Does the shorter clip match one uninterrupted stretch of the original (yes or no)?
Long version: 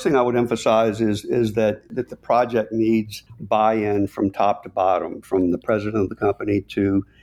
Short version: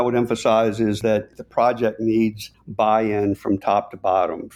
no